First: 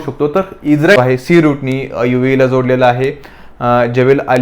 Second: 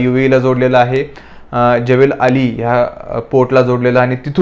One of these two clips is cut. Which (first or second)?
first